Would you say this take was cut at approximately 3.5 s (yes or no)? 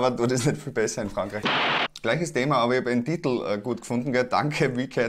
no